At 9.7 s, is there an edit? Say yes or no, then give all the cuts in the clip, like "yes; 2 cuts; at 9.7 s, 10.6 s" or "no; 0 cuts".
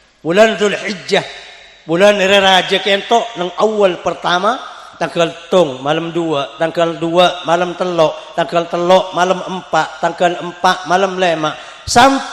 no; 0 cuts